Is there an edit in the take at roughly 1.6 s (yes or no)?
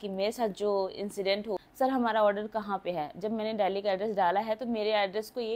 yes